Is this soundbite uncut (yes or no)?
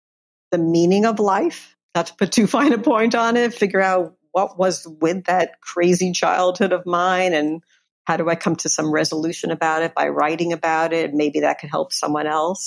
no